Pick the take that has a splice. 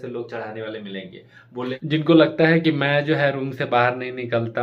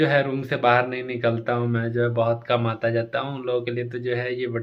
first; 1 cut; at 1.8 s

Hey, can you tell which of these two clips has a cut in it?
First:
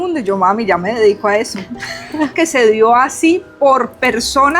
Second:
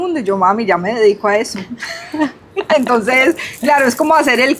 first; 1 cut; at 2.3 s

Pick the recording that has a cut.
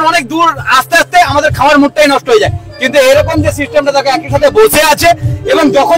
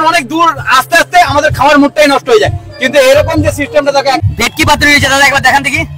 second; 1 cut; at 4.2 s

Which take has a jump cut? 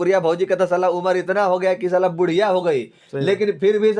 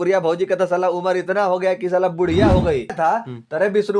second; 1 cut; at 2.9 s

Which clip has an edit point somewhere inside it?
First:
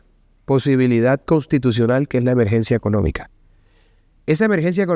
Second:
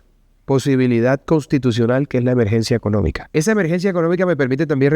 second; 1 cut; at 3.2 s

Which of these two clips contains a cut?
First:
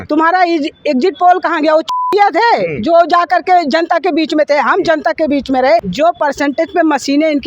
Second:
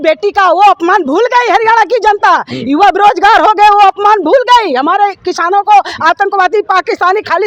first; 1 cut; at 5.9 s

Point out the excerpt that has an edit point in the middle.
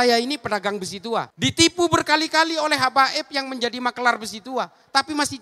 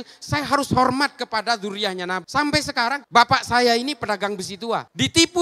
second; 1 cut; at 2.2 s

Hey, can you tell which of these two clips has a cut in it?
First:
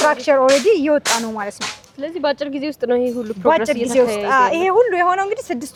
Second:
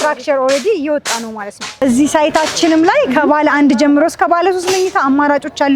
second; 1 cut; at 1.8 s

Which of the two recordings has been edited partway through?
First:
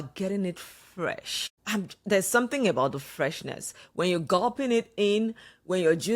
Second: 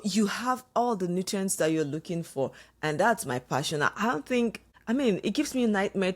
second; 1 cut; at 4.7 s

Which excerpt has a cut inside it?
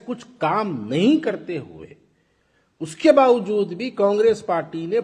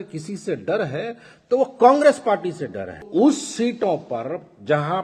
second; 1 cut; at 3.1 s

